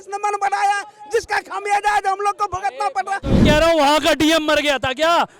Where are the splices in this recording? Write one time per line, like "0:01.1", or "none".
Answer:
0:03.4